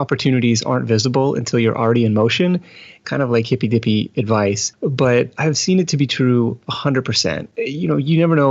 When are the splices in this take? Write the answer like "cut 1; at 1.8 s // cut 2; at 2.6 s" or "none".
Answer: cut 1; at 3.0 s // cut 2; at 5.2 s // cut 3; at 7.5 s